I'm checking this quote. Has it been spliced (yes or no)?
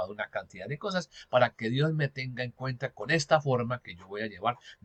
no